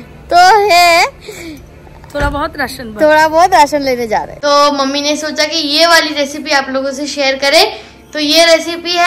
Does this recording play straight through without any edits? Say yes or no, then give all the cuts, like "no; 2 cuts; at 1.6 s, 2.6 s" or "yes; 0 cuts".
no; 1 cut; at 4.3 s